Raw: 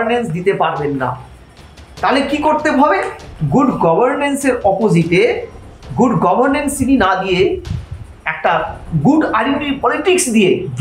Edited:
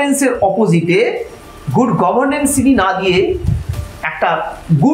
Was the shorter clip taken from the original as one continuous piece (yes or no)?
yes